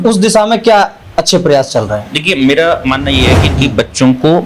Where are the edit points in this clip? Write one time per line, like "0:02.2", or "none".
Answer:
0:03.5

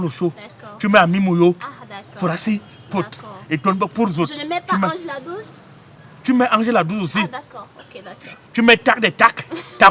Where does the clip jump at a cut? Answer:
none

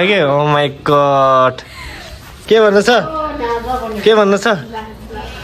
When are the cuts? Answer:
0:02.3

